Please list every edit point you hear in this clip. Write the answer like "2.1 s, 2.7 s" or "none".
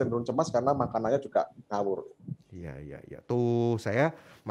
none